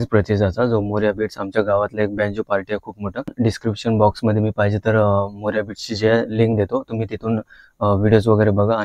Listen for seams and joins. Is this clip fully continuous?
no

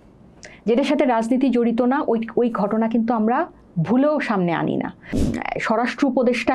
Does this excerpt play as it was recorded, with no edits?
no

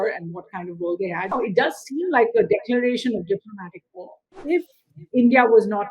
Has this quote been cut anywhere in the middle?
yes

